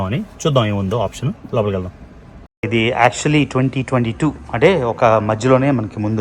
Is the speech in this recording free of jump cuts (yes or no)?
no